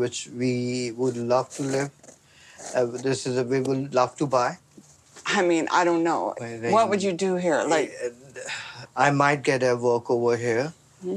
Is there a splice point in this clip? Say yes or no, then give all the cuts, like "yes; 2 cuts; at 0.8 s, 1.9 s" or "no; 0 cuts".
no; 0 cuts